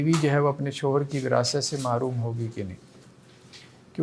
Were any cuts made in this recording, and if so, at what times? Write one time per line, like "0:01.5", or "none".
none

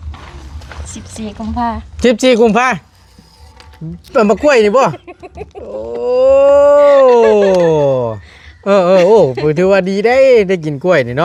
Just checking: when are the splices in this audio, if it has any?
none

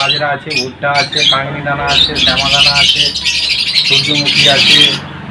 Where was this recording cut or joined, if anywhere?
none

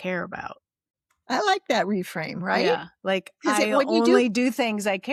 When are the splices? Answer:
none

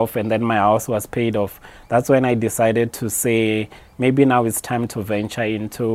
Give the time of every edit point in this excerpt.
none

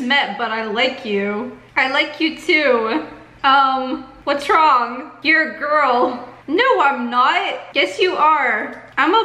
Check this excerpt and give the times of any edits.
0:01.6
0:03.3
0:04.1

